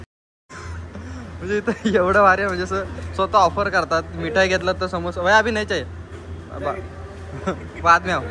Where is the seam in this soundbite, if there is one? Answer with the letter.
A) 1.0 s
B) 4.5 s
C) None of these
C